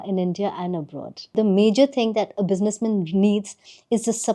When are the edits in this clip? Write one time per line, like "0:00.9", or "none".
0:01.3